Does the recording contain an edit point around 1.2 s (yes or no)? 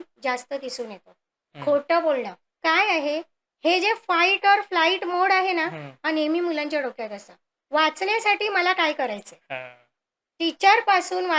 no